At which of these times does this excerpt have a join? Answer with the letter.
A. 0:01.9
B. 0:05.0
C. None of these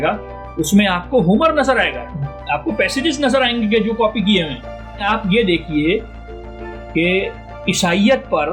B